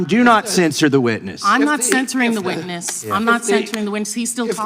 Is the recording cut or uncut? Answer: cut